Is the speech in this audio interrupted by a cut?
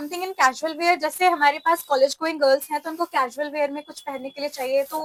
no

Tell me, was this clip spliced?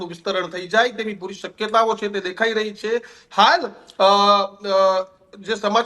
no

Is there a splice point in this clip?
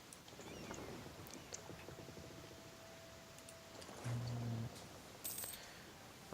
yes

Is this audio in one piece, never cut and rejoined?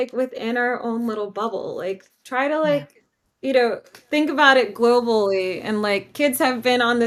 yes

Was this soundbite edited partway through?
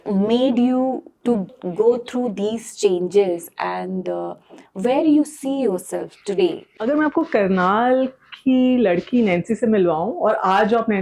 yes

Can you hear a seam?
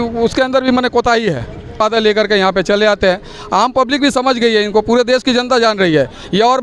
yes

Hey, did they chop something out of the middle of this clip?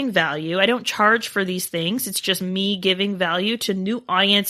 no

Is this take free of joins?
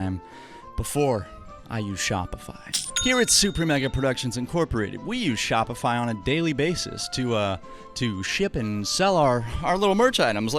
no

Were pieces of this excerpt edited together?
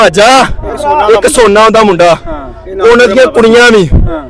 no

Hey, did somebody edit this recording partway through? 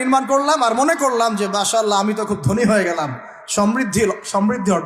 no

